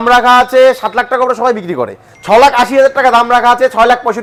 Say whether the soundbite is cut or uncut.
uncut